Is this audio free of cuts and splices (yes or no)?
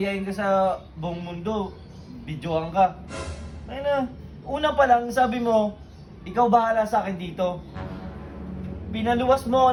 yes